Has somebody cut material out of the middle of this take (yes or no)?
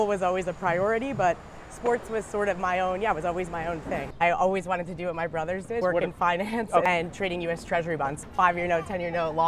yes